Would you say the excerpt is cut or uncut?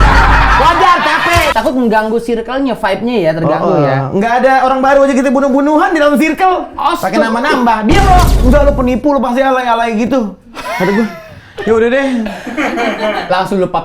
cut